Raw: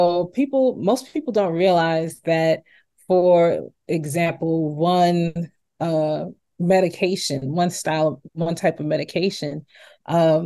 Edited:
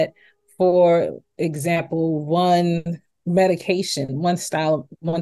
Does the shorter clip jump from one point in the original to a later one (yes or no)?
yes